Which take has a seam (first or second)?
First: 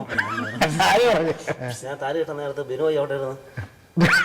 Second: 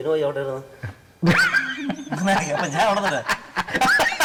first